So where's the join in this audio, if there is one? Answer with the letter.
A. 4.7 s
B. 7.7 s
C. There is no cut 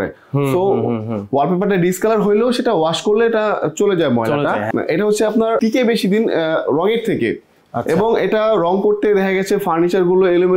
C